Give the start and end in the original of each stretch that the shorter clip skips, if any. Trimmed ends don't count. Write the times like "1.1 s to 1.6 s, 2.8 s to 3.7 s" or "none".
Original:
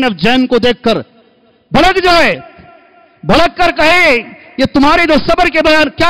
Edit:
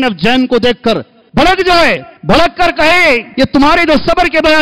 1.1 s to 1.5 s, 2.5 s to 3.1 s, 4.3 s to 4.5 s